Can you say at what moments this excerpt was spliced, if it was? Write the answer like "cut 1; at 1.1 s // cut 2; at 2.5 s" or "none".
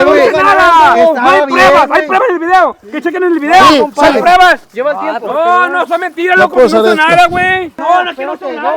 cut 1; at 4.7 s // cut 2; at 7.8 s